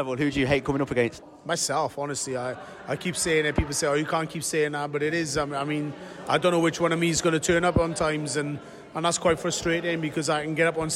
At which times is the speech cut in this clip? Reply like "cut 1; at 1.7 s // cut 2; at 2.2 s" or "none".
cut 1; at 1.3 s